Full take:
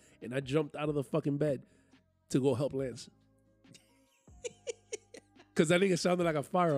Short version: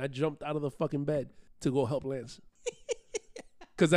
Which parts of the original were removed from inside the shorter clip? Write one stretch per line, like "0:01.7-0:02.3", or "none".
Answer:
0:01.7-0:02.1
0:03.1-0:04.2